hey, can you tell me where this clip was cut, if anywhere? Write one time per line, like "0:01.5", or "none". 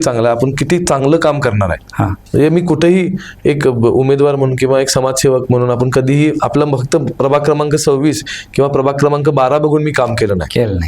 0:02.1